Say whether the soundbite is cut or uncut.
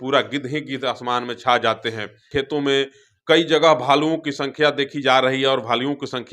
cut